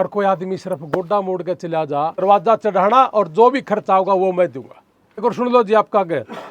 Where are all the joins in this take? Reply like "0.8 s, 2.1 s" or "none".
2.2 s, 5.2 s